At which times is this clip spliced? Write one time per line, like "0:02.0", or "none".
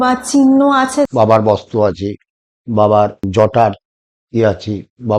0:01.1
0:03.2